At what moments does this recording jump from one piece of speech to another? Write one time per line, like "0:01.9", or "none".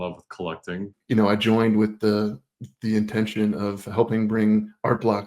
0:00.9